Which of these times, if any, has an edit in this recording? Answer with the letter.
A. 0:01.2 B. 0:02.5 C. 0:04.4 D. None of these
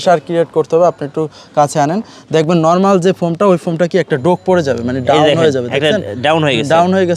D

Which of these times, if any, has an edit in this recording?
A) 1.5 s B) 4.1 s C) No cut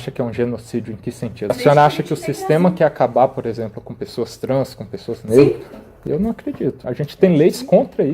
A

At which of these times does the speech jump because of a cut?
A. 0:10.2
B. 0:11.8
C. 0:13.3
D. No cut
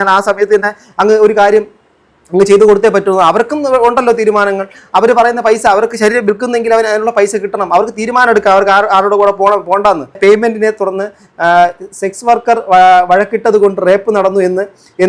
A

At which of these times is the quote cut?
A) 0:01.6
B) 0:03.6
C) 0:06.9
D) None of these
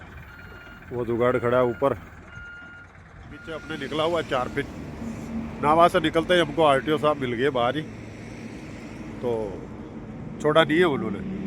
B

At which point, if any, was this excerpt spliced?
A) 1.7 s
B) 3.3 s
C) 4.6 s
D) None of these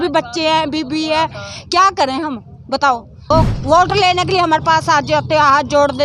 B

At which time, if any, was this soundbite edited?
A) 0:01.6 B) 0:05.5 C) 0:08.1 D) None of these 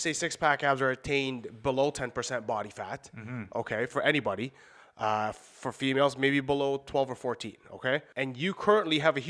C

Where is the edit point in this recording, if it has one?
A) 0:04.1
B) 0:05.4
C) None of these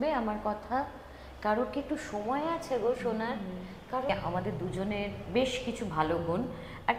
A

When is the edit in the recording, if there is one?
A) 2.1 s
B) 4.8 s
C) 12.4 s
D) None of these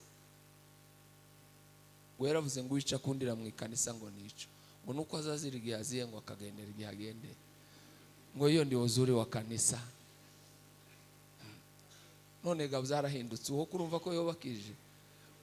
A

